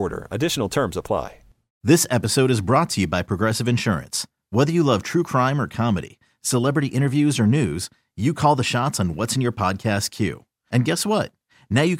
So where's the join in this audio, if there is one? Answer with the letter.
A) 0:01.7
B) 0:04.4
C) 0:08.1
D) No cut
A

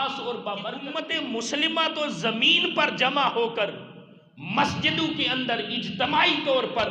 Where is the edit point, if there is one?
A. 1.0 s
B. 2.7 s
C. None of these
A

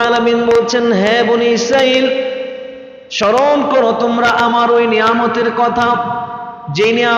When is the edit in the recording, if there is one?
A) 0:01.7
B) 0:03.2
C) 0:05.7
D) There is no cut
D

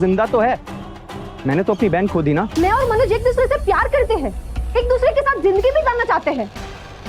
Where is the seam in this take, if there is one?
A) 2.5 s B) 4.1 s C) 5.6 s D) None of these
A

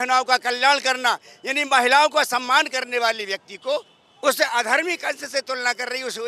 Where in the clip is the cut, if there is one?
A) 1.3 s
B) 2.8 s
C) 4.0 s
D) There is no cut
C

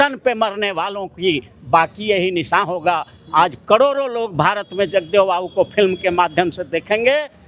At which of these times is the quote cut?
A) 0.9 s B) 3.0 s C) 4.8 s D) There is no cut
D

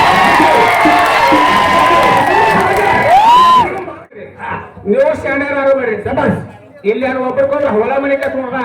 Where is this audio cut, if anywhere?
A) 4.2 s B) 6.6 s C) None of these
A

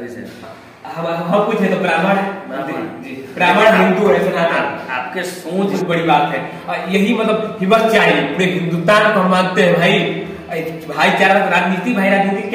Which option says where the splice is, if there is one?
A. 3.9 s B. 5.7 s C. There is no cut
B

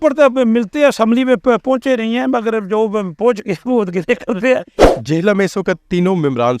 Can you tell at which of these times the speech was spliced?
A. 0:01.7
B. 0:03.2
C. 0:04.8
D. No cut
C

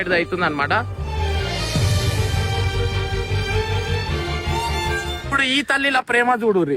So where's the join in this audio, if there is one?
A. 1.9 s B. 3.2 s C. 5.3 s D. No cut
C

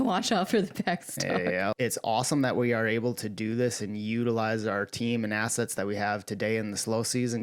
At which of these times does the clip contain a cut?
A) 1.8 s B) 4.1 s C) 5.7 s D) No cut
A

